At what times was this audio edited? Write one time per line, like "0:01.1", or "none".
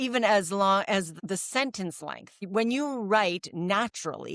0:01.1
0:02.3